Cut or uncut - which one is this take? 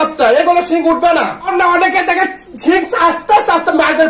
cut